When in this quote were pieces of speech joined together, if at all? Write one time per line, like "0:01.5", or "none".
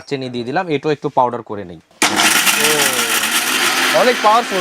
0:03.6